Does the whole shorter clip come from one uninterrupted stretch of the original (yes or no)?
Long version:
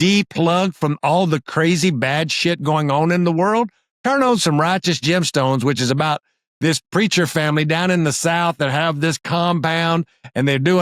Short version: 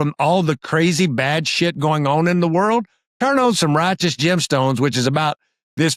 yes